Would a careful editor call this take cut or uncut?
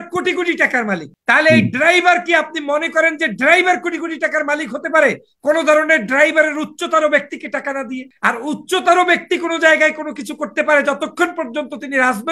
cut